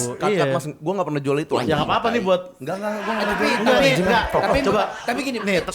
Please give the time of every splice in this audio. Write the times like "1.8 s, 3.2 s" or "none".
none

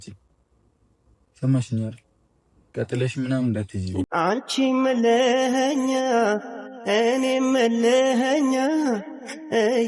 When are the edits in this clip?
4.1 s

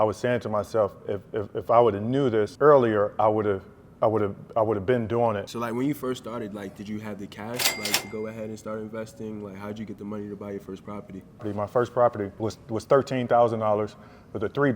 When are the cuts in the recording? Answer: 2.5 s, 5.5 s, 11.5 s, 12.3 s

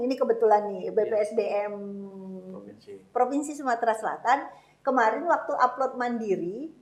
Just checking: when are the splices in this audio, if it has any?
none

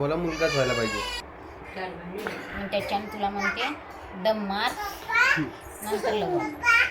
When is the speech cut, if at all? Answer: 1.2 s

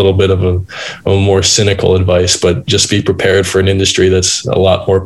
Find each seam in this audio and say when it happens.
none

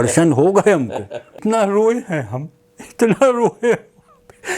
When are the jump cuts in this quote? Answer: 1.4 s

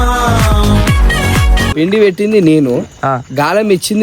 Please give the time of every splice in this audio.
1.6 s

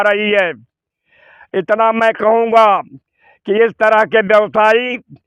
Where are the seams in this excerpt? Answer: none

